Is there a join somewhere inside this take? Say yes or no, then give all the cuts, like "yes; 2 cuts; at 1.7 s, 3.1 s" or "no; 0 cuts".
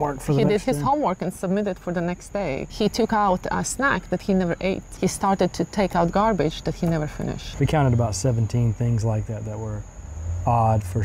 yes; 3 cuts; at 2.7 s, 4.9 s, 7.4 s